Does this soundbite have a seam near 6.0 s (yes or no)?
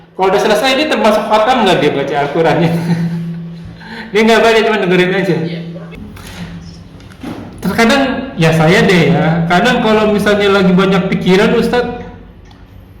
yes